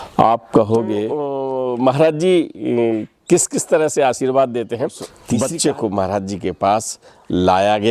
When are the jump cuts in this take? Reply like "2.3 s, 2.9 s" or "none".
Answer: 1.4 s, 5.1 s

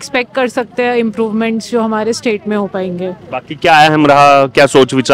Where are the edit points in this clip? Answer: none

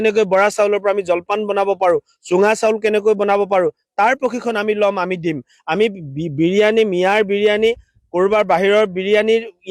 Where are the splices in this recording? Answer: none

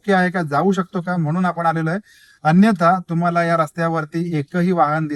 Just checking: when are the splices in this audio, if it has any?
none

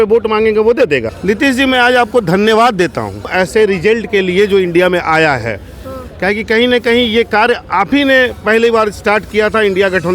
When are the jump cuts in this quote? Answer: 1.1 s, 3.3 s

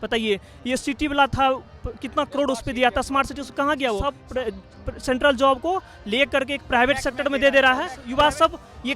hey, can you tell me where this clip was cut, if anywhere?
4.1 s, 8.0 s

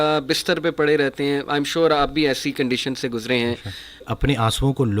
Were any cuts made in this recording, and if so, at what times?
4.1 s

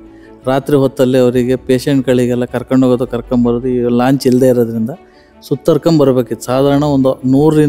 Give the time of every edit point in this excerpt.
none

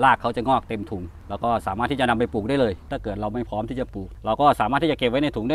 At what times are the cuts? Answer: 1.1 s, 2.9 s

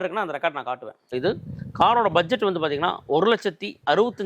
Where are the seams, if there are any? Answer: 1.2 s

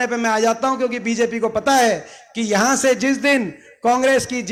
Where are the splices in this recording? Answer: none

